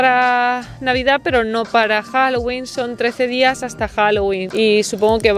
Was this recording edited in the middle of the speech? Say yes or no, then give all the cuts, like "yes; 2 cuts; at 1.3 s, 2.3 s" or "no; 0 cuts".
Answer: no; 0 cuts